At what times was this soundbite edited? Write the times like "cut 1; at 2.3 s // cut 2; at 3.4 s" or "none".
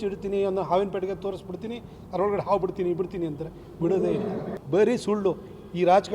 cut 1; at 4.6 s